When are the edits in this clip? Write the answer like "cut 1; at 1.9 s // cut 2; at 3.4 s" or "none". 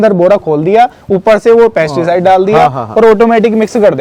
none